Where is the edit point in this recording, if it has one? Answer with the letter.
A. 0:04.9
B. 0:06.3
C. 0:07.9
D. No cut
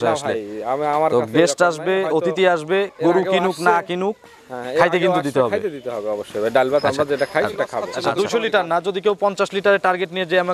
C